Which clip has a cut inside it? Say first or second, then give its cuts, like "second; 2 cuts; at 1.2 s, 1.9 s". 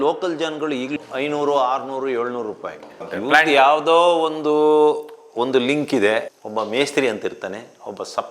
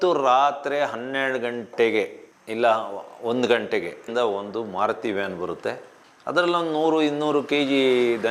first; 2 cuts; at 1.0 s, 3.2 s